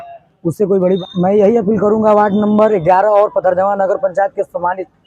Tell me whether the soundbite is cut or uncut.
cut